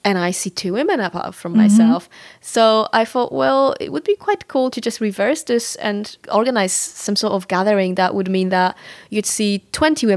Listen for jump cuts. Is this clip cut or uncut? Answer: uncut